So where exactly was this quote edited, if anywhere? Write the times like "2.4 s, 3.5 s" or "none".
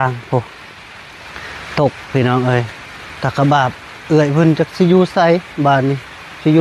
none